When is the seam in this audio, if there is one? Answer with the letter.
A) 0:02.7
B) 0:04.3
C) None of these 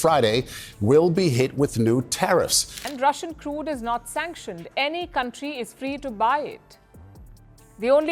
A